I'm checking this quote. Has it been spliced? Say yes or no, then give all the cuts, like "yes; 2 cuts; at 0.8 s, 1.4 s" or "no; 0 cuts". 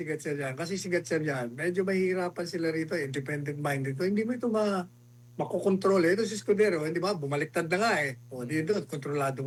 no; 0 cuts